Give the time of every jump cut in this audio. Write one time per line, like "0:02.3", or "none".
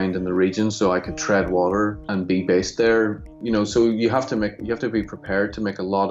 0:02.0
0:03.3